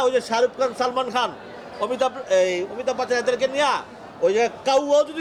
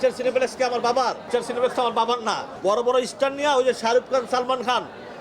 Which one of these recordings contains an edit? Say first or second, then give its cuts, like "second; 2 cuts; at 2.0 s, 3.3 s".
second; 2 cuts; at 1.2 s, 2.5 s